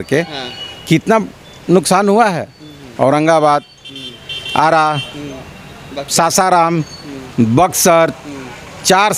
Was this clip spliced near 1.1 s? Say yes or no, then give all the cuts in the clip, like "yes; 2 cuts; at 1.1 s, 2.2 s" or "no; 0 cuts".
no; 0 cuts